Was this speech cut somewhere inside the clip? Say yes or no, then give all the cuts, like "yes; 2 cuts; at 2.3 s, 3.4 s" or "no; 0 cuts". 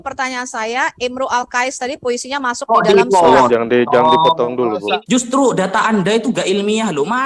yes; 1 cut; at 5.0 s